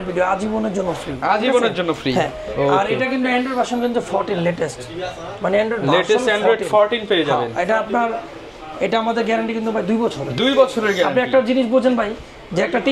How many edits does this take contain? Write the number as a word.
zero